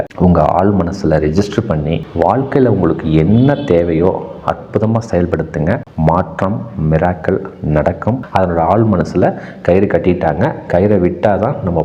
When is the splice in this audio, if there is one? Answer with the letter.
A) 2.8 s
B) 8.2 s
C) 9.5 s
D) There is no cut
B